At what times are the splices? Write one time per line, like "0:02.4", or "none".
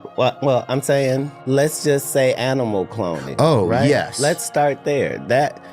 0:01.3